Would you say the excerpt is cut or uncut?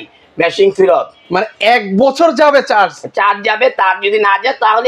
uncut